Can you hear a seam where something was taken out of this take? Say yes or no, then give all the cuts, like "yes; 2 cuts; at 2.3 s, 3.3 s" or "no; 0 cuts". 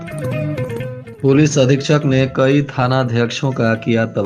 no; 0 cuts